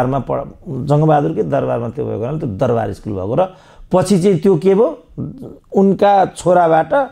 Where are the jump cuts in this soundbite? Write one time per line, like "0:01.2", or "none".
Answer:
none